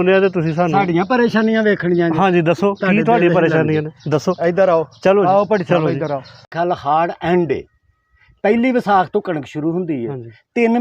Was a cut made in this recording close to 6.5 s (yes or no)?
yes